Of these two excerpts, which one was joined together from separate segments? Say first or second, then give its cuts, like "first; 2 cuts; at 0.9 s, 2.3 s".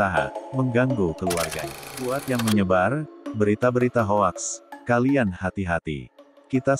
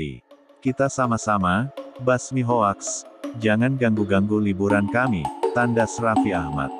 first; 1 cut; at 1.5 s